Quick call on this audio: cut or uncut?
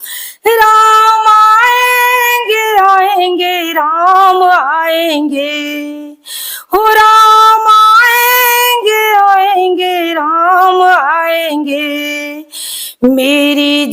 uncut